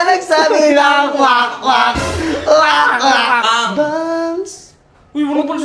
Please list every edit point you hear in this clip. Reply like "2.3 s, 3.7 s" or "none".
3.4 s